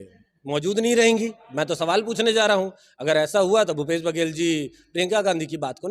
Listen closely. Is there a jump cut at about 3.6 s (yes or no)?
no